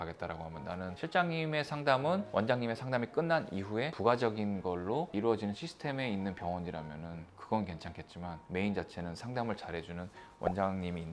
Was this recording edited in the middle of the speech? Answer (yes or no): no